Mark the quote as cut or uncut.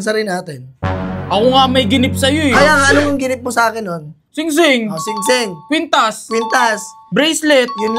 uncut